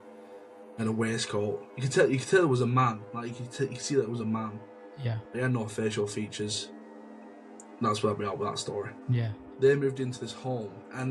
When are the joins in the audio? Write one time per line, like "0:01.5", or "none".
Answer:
0:09.4